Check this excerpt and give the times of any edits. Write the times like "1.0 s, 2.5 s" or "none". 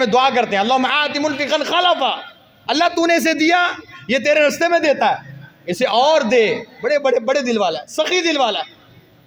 none